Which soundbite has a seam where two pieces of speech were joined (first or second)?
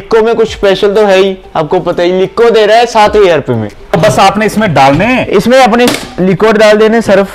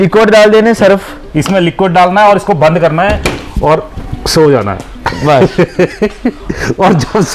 first